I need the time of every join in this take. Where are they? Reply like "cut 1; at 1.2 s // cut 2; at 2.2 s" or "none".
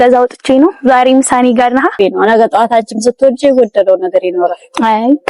cut 1; at 1.9 s